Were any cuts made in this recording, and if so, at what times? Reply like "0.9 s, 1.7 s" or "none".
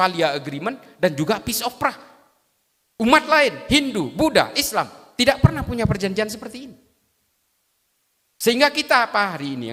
none